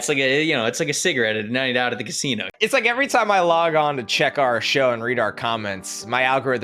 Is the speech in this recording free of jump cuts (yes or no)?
no